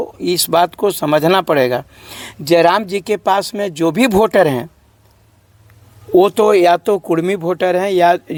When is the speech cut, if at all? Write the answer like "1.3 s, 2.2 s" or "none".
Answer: none